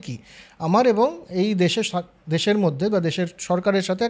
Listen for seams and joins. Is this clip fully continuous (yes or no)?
yes